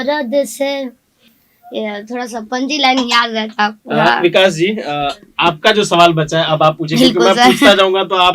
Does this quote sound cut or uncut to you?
uncut